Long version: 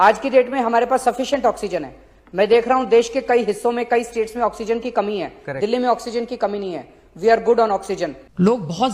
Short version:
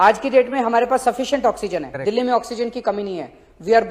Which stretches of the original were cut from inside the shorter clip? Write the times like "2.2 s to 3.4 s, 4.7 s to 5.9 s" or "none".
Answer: 1.9 s to 5.4 s